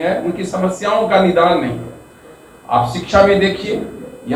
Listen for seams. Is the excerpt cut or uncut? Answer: uncut